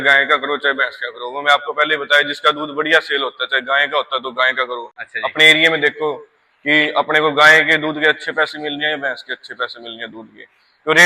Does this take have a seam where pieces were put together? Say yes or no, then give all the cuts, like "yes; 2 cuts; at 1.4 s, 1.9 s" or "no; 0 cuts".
no; 0 cuts